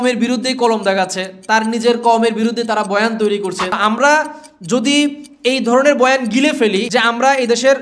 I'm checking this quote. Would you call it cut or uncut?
cut